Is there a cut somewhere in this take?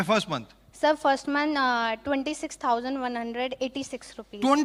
no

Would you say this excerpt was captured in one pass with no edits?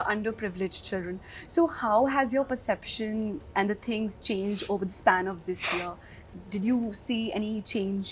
yes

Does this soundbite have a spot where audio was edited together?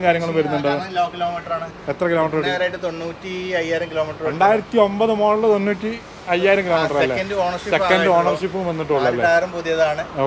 no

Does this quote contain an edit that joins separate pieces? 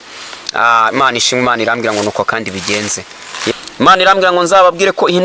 yes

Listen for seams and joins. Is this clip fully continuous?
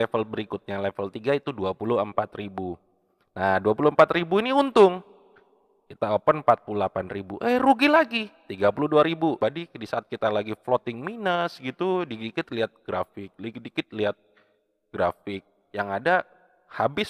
no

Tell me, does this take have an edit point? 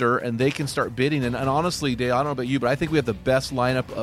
no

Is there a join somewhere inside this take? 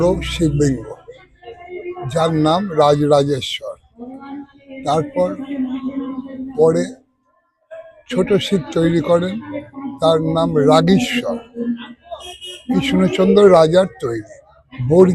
no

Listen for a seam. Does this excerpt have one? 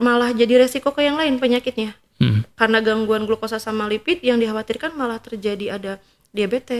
no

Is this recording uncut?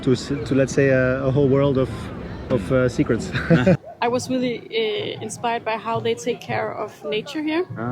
no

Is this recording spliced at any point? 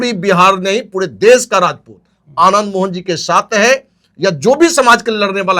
no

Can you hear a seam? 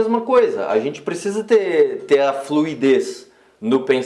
no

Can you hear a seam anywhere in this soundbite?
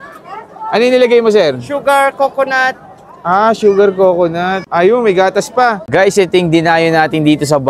yes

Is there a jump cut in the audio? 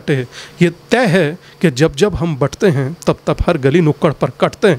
no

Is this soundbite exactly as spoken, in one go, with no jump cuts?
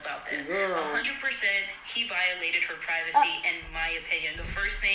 yes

